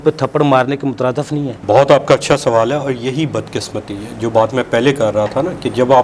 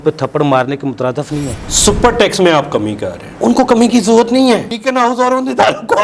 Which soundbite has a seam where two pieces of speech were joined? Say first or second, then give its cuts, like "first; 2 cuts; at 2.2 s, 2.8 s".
second; 2 cuts; at 1.6 s, 4.7 s